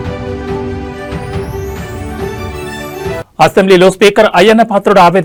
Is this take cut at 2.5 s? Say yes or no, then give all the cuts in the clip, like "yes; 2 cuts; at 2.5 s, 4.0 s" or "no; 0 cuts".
no; 0 cuts